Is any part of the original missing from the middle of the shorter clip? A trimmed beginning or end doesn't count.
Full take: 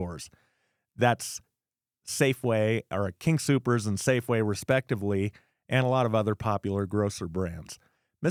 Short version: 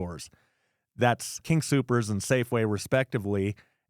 yes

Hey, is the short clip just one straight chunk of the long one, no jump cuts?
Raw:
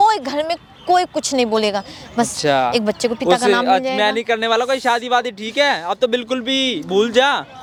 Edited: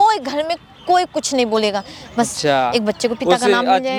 yes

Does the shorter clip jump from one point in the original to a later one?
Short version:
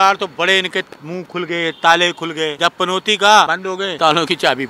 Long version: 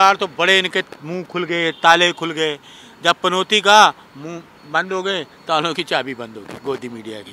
yes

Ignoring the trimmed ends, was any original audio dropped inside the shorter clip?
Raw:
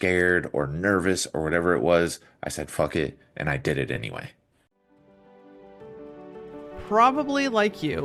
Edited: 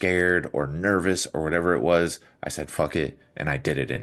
no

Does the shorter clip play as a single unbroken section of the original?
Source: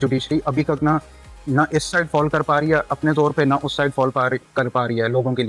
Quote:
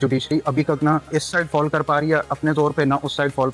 no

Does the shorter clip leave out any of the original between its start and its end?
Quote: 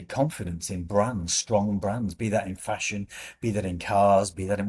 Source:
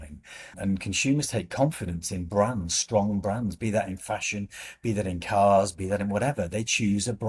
no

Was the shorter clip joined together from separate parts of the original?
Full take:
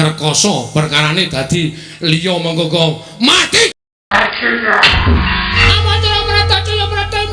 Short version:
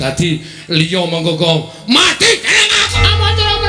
yes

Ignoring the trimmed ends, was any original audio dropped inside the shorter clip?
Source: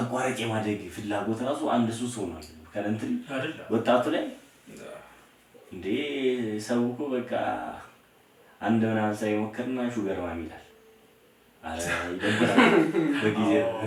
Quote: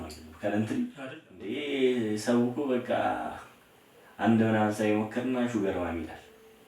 yes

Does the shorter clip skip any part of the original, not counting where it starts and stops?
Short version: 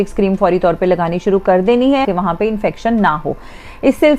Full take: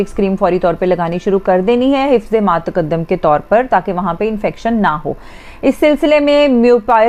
yes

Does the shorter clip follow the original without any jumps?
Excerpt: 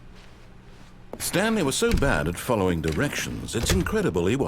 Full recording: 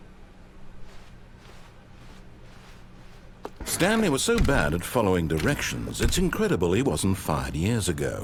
no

